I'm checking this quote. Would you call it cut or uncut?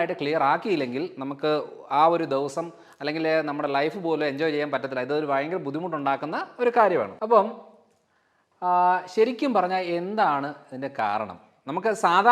uncut